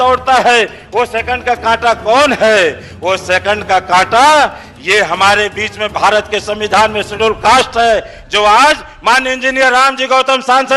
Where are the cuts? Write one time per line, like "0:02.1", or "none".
none